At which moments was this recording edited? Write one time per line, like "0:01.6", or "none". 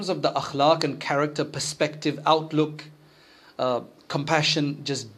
none